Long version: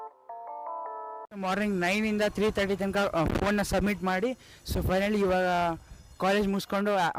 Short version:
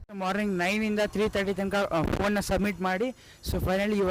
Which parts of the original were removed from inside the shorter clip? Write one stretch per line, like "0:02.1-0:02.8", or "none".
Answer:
none